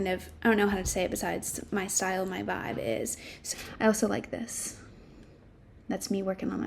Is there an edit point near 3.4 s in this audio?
yes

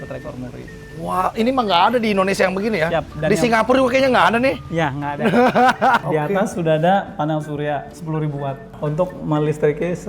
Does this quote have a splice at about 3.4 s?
no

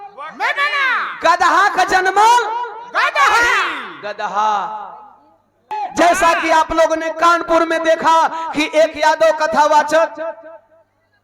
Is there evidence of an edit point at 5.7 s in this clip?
yes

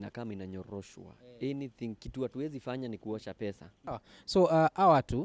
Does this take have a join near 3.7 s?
yes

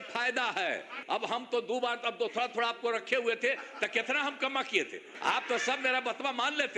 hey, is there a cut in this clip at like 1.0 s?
yes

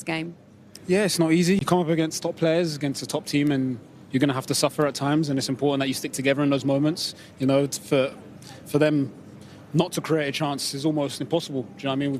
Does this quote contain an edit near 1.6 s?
yes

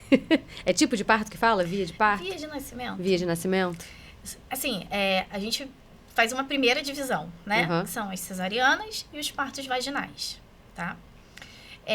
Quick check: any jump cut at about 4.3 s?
no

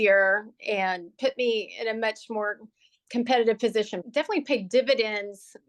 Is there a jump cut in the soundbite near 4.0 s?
yes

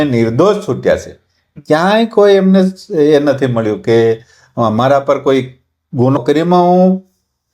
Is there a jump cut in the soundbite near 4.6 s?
no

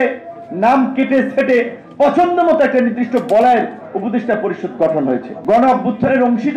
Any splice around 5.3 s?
yes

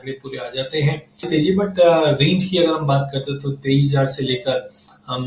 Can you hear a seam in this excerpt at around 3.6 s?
no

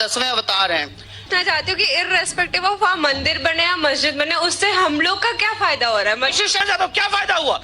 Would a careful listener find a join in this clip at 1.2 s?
yes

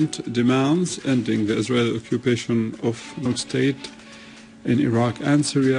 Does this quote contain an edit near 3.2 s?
no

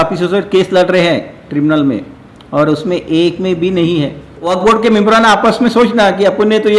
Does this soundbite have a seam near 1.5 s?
no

